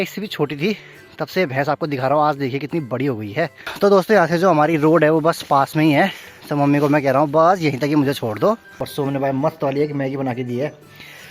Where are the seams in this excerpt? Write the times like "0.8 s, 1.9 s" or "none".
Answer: 3.6 s, 8.8 s